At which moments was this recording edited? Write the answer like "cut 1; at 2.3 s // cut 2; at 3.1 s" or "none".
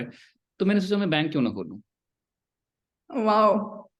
none